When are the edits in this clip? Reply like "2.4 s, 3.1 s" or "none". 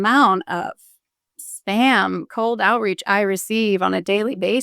none